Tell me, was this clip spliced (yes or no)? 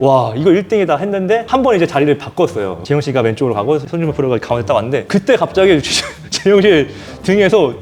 no